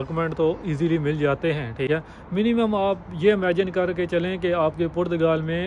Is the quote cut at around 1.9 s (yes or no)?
yes